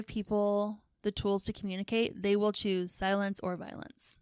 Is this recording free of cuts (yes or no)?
yes